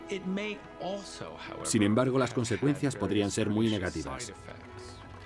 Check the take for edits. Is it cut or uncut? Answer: cut